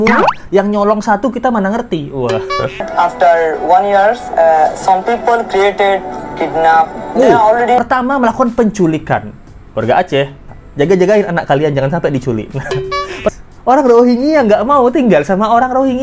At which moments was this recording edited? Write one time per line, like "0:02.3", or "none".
0:02.9
0:07.8
0:13.3